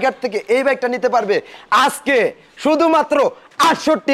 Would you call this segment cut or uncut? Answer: uncut